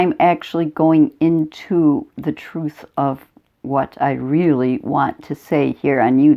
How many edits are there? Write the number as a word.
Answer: zero